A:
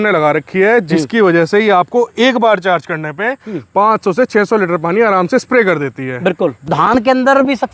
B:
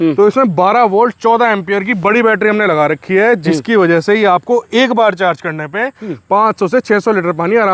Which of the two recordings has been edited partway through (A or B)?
A